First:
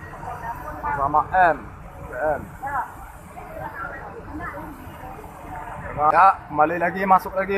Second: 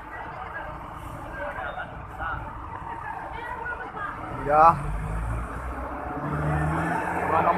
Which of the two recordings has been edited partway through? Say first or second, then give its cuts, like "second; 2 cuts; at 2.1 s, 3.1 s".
first; 1 cut; at 6.1 s